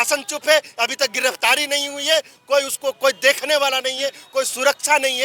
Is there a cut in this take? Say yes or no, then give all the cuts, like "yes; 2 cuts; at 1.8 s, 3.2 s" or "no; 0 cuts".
no; 0 cuts